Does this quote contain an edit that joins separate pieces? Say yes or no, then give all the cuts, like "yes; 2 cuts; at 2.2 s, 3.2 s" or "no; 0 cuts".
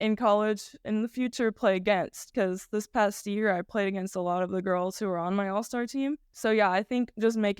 yes; 2 cuts; at 0.8 s, 6.3 s